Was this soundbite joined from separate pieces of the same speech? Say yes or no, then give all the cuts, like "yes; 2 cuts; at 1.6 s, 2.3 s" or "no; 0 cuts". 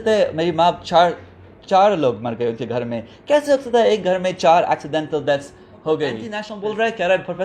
yes; 1 cut; at 6.5 s